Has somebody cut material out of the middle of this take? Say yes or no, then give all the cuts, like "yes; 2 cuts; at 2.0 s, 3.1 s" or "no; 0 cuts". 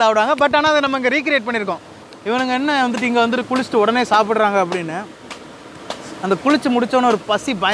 yes; 1 cut; at 1.9 s